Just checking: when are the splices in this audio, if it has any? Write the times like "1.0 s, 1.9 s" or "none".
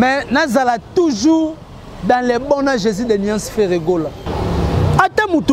4.2 s

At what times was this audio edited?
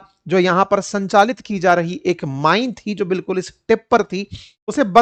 none

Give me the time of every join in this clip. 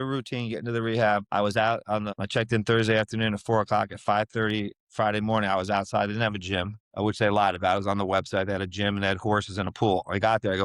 1.3 s, 2.1 s, 6.8 s

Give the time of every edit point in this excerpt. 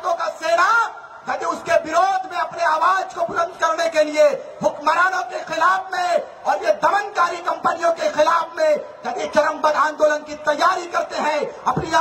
none

